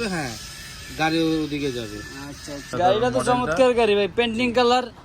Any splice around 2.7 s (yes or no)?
yes